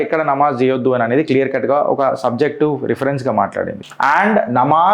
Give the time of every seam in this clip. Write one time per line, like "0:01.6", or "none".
0:03.8